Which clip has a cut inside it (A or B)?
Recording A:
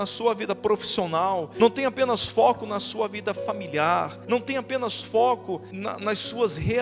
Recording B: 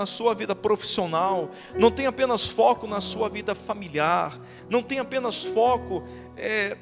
A